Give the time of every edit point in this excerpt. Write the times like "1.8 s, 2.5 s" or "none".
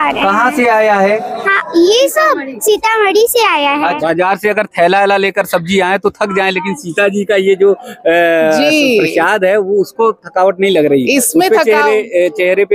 4.0 s